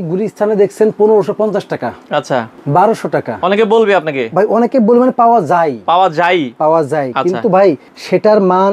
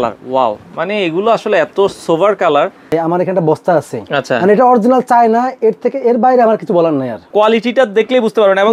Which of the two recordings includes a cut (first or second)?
second